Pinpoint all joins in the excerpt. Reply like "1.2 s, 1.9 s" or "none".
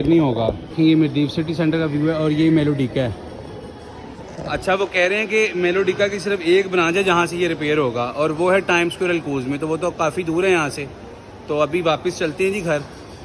none